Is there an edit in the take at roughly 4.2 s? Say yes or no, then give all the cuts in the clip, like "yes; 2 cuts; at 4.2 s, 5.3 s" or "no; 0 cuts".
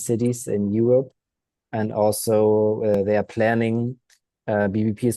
no; 0 cuts